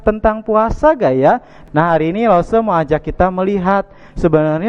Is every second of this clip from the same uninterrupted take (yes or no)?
no